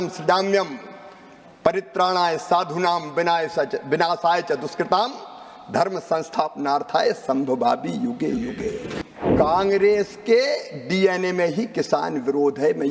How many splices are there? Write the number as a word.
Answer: one